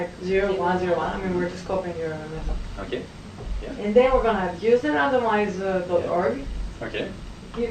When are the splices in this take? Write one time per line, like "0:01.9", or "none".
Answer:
none